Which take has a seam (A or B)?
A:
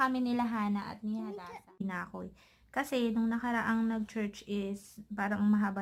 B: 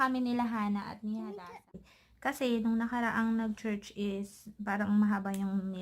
B